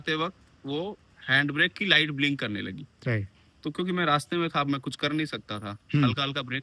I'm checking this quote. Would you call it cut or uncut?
uncut